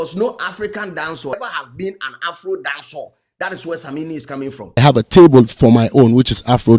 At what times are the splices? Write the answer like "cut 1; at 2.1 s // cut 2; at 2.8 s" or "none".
cut 1; at 1.3 s // cut 2; at 4.8 s